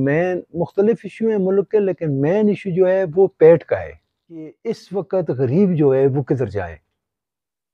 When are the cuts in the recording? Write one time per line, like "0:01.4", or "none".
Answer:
0:04.5